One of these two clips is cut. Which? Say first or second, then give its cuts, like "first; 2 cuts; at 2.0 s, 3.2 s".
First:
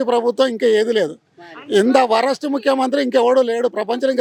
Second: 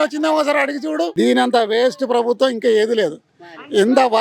second; 1 cut; at 1.1 s